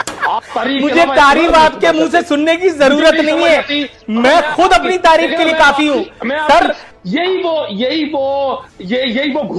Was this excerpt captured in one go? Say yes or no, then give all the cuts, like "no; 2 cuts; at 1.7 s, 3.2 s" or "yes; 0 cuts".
no; 1 cut; at 6.9 s